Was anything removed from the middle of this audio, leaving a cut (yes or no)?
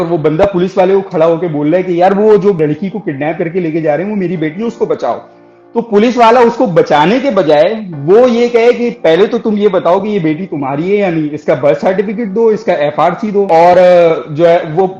yes